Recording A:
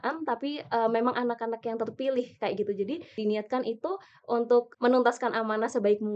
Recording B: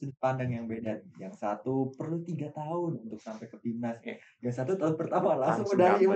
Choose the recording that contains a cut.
A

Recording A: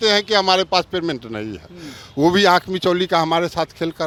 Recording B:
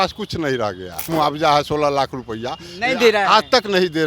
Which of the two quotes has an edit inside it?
B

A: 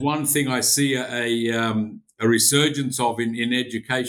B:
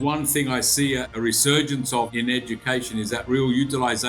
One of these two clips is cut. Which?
B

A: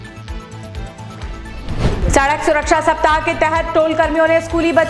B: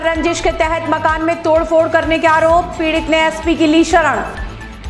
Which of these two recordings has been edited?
A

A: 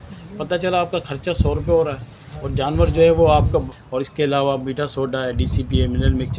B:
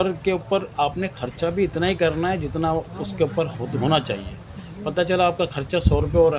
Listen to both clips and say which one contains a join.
A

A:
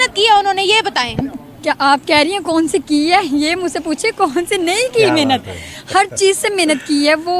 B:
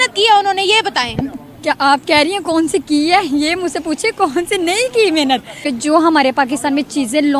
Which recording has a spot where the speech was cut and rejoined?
B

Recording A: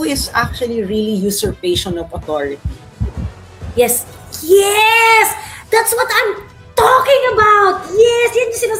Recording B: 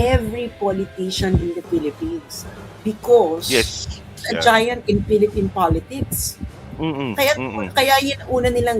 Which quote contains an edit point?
B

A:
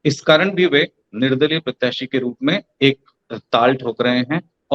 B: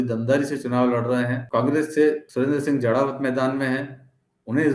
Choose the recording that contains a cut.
B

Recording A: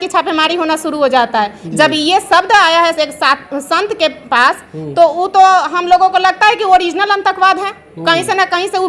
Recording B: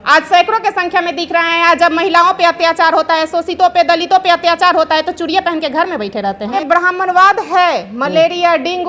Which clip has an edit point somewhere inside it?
B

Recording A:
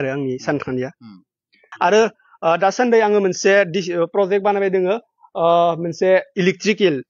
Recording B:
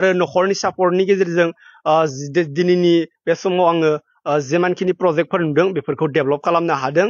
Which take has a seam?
A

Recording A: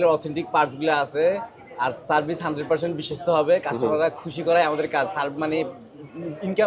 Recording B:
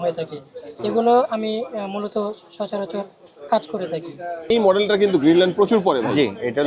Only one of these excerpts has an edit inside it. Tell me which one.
B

